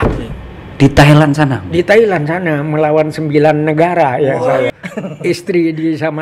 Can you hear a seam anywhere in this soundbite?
yes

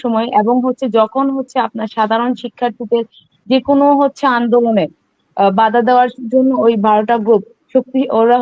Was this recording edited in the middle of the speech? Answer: no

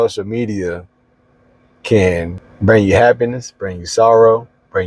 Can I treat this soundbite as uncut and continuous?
no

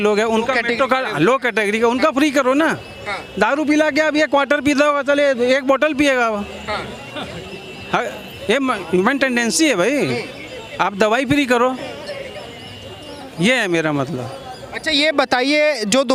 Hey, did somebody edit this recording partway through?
no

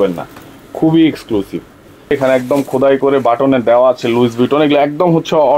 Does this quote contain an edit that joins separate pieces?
yes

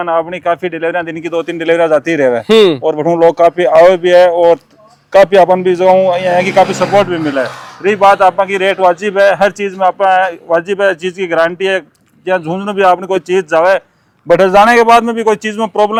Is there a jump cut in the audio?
no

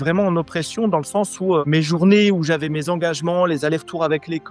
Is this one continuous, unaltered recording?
no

